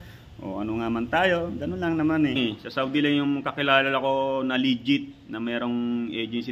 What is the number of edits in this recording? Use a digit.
1